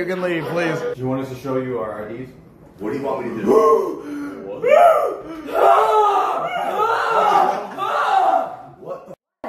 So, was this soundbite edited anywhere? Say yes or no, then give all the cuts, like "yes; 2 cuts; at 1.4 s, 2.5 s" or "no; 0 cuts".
yes; 1 cut; at 1.0 s